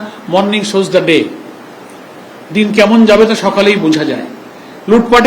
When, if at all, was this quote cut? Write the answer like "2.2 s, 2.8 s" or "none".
none